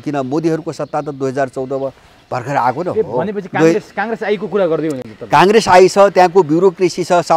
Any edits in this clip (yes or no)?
no